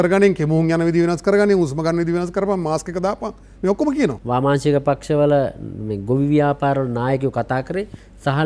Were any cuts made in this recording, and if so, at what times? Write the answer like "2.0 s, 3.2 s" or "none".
4.2 s